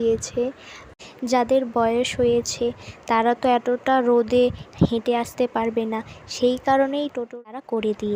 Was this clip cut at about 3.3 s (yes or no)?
no